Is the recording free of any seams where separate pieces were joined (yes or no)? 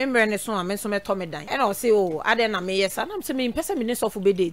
no